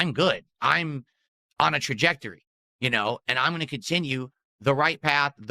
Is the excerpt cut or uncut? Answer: uncut